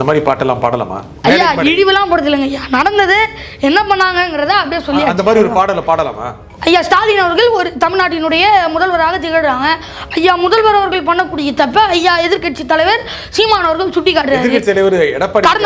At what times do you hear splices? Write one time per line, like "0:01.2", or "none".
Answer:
0:01.1
0:06.5